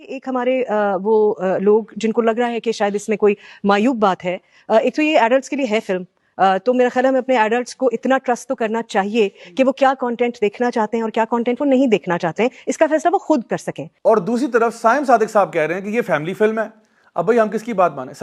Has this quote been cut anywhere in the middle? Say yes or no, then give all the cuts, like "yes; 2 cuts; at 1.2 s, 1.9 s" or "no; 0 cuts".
no; 0 cuts